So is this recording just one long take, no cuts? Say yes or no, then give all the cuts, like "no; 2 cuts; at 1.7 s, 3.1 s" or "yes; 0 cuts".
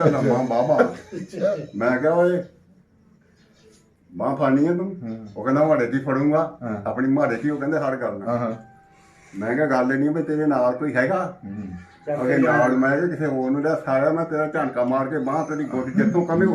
yes; 0 cuts